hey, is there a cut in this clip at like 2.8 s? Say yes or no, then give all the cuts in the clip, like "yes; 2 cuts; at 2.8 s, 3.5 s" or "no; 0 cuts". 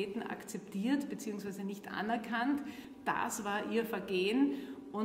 yes; 1 cut; at 2.8 s